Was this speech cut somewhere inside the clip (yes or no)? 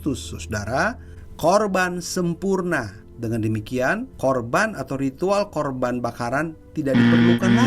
yes